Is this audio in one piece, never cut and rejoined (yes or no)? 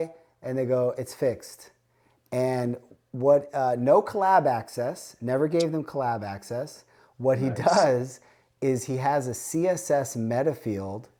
yes